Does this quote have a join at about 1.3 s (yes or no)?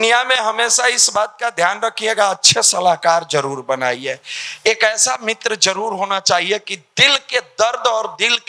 no